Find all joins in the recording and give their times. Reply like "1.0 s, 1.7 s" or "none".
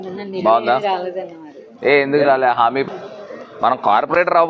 2.9 s